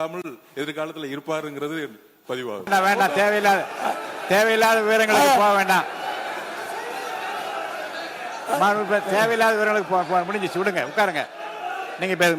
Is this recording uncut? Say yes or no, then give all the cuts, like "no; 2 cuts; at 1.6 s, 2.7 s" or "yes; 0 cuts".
no; 1 cut; at 2.7 s